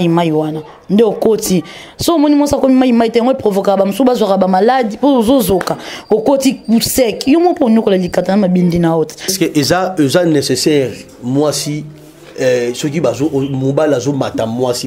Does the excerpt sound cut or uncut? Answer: cut